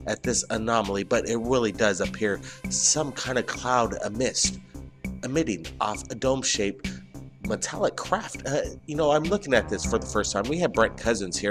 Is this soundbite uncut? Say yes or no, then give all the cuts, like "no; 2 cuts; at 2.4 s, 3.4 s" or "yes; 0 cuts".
yes; 0 cuts